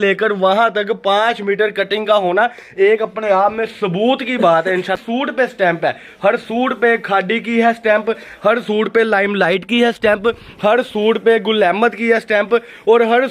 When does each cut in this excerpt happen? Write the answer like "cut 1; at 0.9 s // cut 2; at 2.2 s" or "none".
none